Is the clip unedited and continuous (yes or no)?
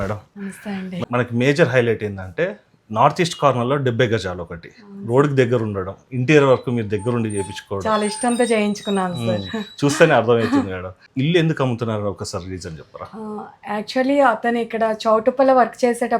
no